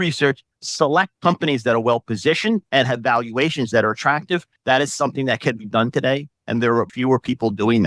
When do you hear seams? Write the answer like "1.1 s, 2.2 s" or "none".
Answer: 1.1 s, 2.7 s, 4.5 s, 6.9 s